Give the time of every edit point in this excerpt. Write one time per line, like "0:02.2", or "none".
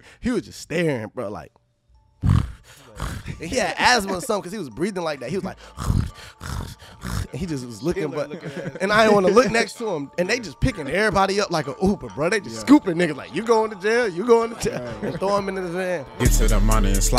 0:16.1